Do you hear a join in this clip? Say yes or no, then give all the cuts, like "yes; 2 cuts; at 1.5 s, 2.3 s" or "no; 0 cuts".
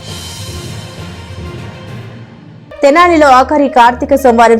yes; 1 cut; at 2.8 s